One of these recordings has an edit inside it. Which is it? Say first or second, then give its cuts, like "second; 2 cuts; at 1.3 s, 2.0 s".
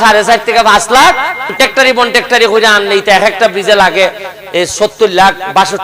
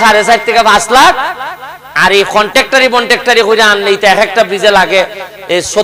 first; 1 cut; at 1.5 s